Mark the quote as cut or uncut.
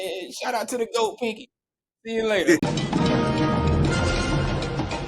cut